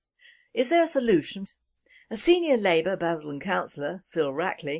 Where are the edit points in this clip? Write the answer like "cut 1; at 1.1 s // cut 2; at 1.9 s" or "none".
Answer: none